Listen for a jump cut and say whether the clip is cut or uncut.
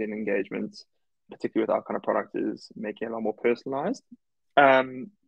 cut